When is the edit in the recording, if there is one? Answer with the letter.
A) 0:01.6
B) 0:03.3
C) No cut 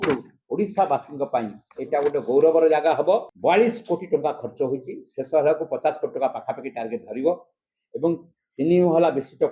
B